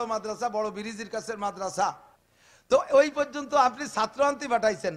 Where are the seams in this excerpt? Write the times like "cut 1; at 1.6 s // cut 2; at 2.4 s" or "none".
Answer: cut 1; at 2.0 s